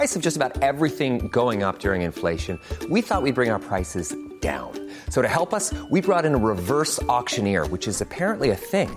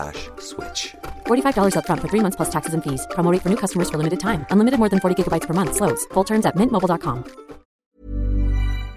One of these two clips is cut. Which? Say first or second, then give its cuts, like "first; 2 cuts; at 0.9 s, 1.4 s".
second; 1 cut; at 7.7 s